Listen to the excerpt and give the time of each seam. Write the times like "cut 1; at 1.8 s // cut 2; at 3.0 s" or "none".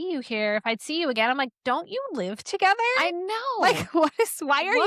none